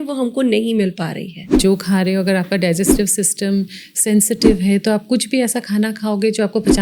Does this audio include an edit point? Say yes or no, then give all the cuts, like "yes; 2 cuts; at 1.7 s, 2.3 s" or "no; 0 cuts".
yes; 1 cut; at 1.6 s